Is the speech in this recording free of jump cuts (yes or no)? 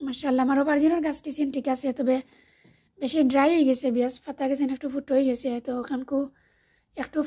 yes